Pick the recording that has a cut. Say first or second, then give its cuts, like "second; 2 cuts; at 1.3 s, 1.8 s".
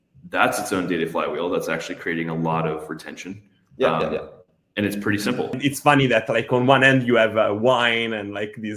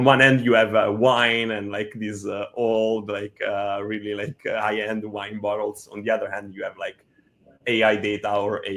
first; 1 cut; at 5.6 s